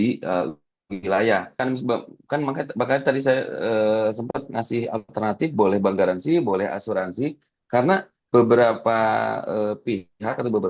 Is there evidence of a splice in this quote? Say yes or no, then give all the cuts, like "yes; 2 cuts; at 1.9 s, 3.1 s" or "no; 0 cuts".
yes; 1 cut; at 1.6 s